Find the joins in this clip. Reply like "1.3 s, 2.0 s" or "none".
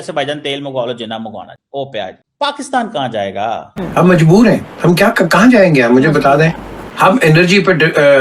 2.2 s, 3.7 s